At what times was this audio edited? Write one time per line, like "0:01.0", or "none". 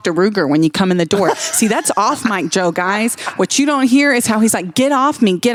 none